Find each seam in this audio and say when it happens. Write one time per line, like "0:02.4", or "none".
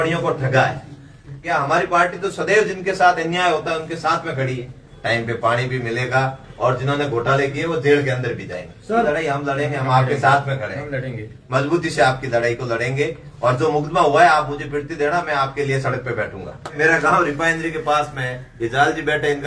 0:01.4
0:04.9
0:09.1
0:16.7